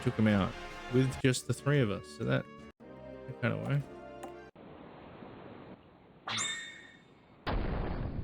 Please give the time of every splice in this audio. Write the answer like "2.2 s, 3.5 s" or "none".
5.8 s